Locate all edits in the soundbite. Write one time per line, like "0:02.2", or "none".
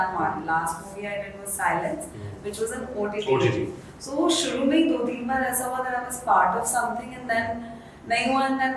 none